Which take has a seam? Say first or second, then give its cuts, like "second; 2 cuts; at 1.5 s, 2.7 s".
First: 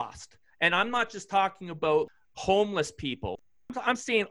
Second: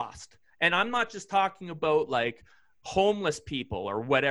first; 2 cuts; at 2.1 s, 3.4 s